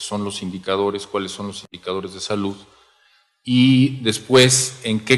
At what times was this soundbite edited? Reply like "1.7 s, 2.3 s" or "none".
4.2 s